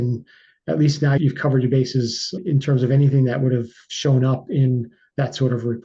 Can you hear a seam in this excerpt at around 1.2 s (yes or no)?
yes